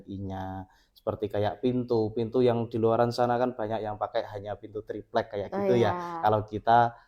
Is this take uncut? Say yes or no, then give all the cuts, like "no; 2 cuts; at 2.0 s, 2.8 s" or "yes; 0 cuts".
yes; 0 cuts